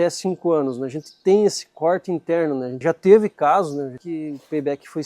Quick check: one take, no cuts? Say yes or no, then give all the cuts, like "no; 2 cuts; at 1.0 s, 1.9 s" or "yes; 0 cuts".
no; 2 cuts; at 2.7 s, 4.0 s